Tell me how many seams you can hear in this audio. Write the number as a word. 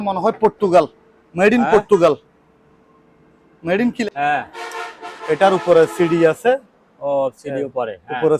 one